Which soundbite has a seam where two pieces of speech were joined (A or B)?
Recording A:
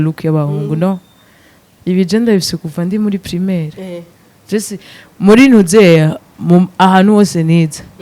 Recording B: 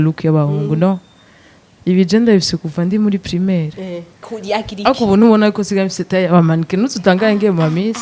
B